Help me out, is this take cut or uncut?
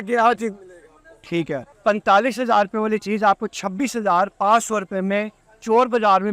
cut